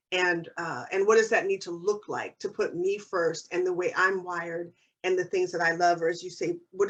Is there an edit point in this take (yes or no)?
no